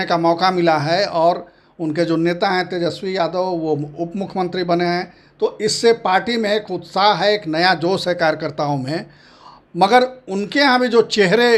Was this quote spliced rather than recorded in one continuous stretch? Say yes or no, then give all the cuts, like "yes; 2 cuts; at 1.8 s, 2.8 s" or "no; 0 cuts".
no; 0 cuts